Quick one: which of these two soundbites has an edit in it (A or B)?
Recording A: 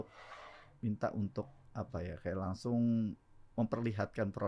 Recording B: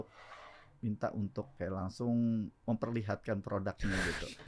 B